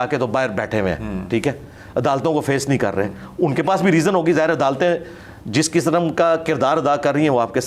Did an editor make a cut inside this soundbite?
no; 0 cuts

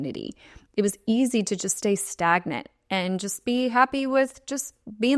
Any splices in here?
no; 0 cuts

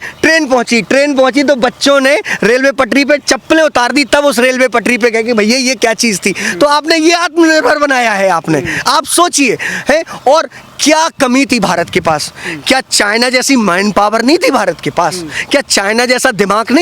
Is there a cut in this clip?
no; 0 cuts

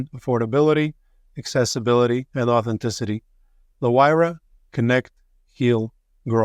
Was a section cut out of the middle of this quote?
no; 0 cuts

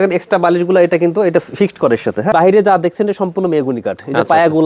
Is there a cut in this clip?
yes; 1 cut; at 2.3 s

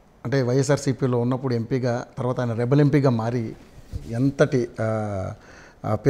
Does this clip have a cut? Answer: no; 0 cuts

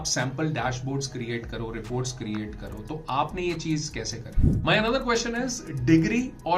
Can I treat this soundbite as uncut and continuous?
no; 1 cut; at 4.3 s

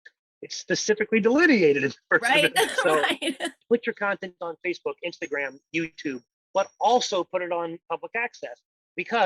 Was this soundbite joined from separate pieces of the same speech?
yes; 1 cut; at 3.6 s

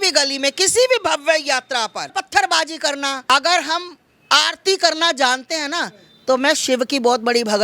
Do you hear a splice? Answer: yes; 2 cuts; at 2.1 s, 3.2 s

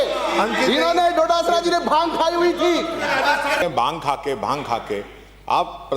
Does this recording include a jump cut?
yes; 1 cut; at 3.6 s

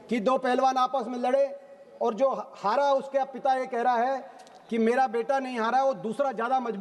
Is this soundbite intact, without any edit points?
yes; 0 cuts

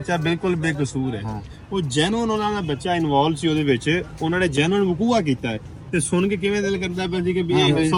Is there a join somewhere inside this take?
no; 0 cuts

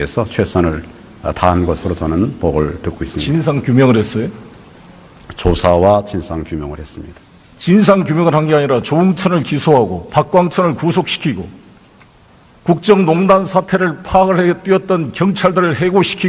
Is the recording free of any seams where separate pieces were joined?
no; 1 cut; at 13.8 s

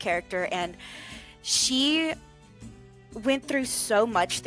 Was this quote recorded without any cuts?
yes; 0 cuts

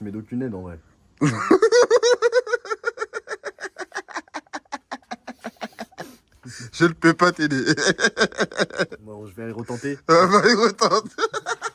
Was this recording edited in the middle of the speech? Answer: no; 0 cuts

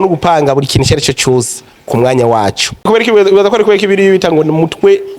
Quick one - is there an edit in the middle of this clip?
yes; 1 cut; at 2.9 s

